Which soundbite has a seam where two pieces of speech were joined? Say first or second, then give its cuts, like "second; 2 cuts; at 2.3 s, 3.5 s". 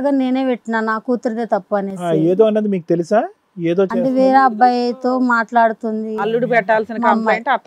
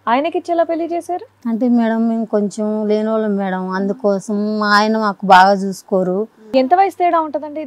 second; 1 cut; at 6.4 s